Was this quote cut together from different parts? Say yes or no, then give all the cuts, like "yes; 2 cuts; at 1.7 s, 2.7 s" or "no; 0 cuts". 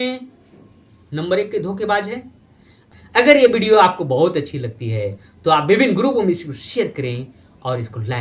yes; 1 cut; at 2.9 s